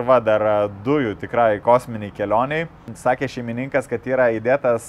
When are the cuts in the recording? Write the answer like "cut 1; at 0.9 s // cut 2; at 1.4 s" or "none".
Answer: cut 1; at 2.9 s

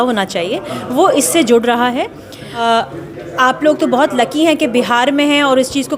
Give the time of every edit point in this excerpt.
cut 1; at 2.6 s

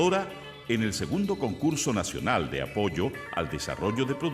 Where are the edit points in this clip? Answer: none

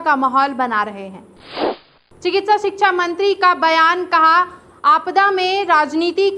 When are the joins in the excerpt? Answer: cut 1; at 1.7 s

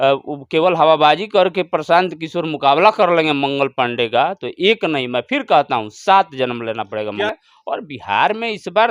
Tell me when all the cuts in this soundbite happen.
cut 1; at 7.3 s

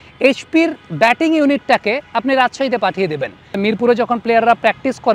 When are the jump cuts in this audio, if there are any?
cut 1; at 3.6 s

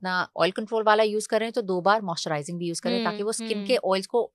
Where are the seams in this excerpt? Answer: none

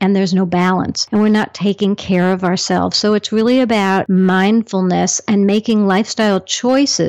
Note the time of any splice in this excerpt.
cut 1; at 1.0 s // cut 2; at 4.1 s

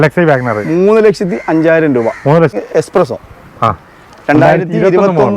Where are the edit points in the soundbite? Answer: cut 1; at 2.5 s

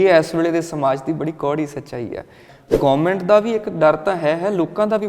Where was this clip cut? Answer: cut 1; at 2.5 s

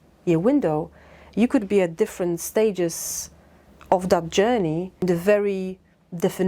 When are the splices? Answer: cut 1; at 5.0 s

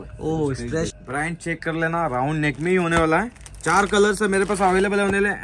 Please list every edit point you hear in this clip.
cut 1; at 0.9 s

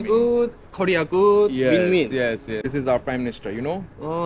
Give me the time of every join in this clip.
cut 1; at 2.7 s

